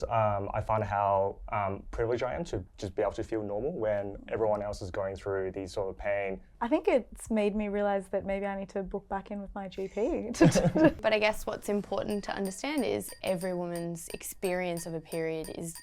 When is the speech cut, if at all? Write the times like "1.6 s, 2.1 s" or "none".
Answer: 6.5 s, 11.0 s